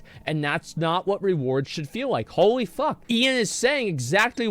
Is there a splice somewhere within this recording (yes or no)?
yes